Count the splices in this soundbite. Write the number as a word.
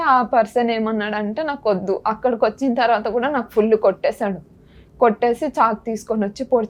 zero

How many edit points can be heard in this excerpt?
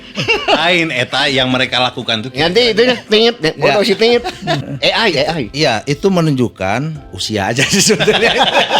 one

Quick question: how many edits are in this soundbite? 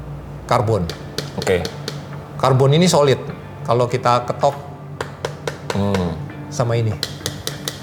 zero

